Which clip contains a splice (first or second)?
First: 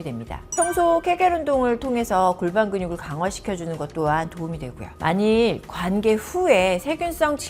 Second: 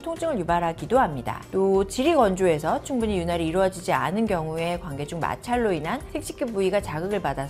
first